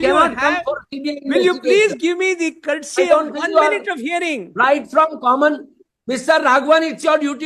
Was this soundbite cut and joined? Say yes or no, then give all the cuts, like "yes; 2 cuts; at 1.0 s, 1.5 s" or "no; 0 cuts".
no; 0 cuts